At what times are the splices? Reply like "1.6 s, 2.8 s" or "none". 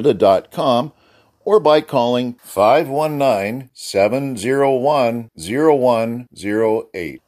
none